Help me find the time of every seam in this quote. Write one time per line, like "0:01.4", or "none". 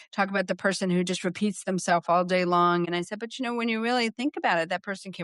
0:02.9